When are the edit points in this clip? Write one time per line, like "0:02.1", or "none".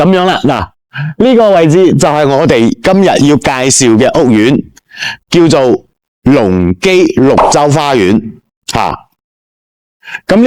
none